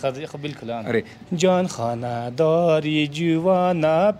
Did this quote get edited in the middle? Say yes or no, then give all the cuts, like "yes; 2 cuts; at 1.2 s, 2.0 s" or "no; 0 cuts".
yes; 1 cut; at 1.1 s